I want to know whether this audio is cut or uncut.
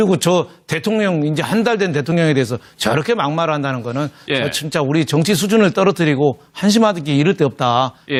uncut